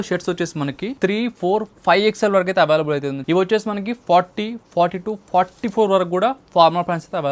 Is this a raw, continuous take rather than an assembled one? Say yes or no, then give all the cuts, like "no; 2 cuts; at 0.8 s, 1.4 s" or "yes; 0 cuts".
no; 2 cuts; at 0.8 s, 3.2 s